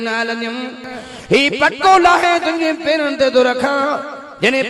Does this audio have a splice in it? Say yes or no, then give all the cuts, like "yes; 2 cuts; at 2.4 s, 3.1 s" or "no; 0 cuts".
yes; 1 cut; at 1.0 s